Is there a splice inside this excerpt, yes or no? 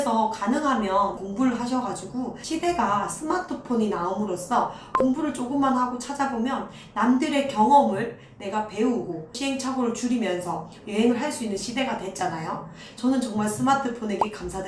yes